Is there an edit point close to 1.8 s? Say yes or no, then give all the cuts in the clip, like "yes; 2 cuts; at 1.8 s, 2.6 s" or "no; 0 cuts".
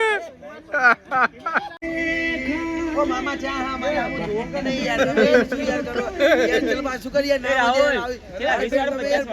yes; 1 cut; at 1.8 s